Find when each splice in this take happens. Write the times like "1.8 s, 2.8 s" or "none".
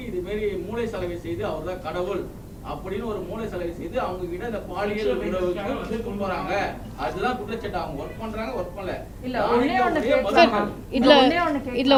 none